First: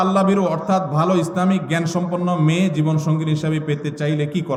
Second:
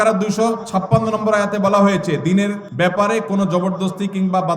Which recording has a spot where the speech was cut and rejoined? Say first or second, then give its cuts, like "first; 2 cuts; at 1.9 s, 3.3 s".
second; 1 cut; at 2.6 s